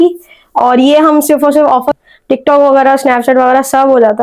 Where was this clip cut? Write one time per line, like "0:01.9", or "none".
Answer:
0:01.9